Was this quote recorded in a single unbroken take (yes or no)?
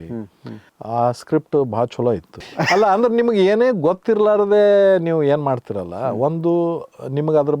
no